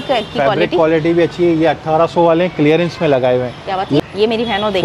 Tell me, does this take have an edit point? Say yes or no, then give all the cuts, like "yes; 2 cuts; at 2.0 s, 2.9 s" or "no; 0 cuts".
no; 0 cuts